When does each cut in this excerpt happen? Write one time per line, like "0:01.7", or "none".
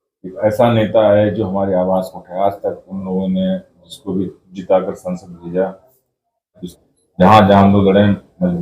0:06.6